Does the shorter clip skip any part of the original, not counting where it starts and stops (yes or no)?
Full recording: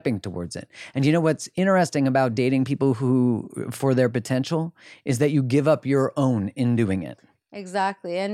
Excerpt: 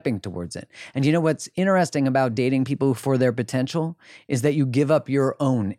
yes